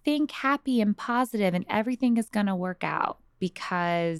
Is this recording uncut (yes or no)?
no